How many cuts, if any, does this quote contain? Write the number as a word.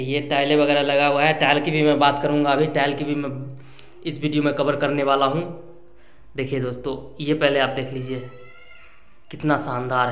zero